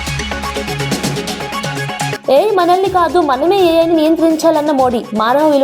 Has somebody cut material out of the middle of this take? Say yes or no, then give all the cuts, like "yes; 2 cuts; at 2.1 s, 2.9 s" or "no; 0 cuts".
yes; 1 cut; at 2.1 s